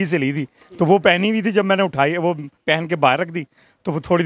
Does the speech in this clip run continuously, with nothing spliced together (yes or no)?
yes